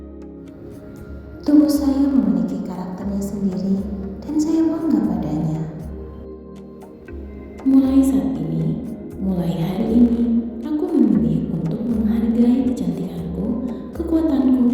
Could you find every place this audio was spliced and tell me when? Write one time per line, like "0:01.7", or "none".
0:00.8
0:05.9
0:07.6